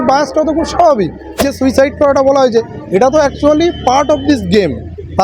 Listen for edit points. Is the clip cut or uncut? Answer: cut